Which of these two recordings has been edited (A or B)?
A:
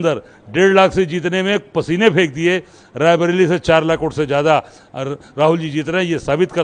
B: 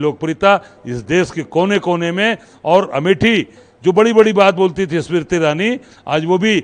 B